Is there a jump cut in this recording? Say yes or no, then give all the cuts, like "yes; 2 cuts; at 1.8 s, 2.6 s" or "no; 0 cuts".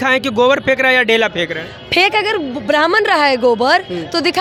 no; 0 cuts